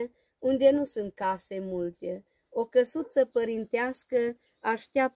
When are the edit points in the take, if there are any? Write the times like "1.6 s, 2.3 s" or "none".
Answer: none